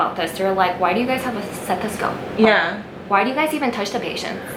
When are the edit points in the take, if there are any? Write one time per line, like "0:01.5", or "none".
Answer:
none